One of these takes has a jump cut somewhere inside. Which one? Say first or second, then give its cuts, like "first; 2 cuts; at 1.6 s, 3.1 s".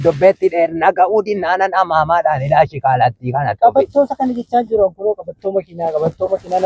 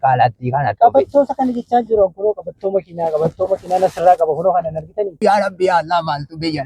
second; 1 cut; at 5.2 s